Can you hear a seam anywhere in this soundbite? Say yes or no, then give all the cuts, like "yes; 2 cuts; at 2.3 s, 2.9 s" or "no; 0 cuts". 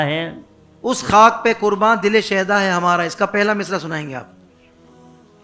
yes; 1 cut; at 4.3 s